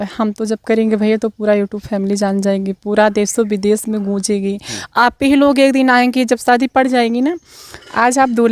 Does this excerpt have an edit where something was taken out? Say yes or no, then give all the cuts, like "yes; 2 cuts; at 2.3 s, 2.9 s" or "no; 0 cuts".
no; 0 cuts